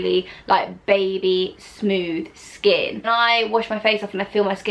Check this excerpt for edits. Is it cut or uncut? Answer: cut